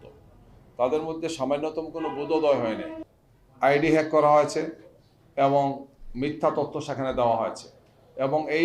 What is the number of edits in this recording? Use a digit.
1